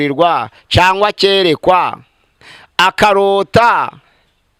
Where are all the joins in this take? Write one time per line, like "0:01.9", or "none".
none